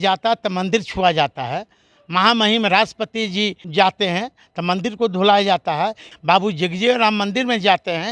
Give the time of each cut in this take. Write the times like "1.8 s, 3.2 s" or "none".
3.6 s, 6.1 s

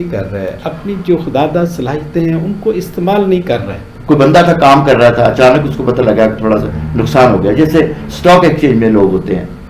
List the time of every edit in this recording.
3.9 s

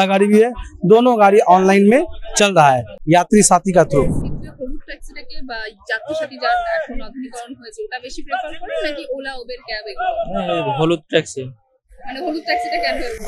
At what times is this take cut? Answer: none

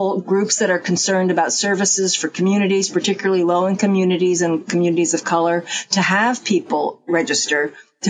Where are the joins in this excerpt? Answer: none

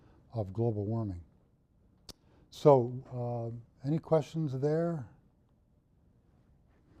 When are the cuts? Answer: none

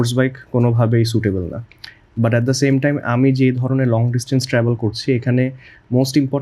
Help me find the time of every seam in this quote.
none

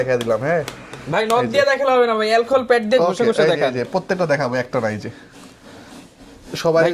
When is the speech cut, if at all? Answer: none

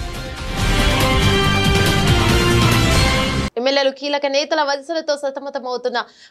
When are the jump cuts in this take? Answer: 3.5 s

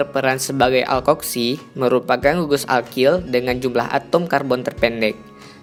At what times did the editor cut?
none

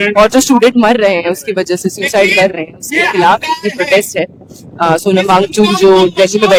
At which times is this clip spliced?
none

